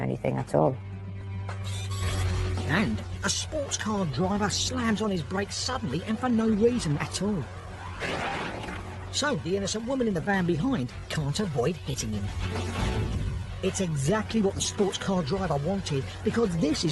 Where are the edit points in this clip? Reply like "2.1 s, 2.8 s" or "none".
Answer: 2.9 s